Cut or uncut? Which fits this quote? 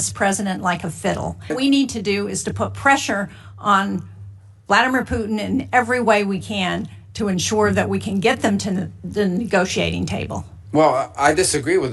cut